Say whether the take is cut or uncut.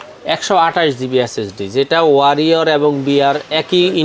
uncut